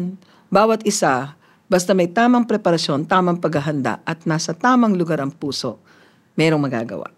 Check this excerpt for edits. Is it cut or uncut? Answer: uncut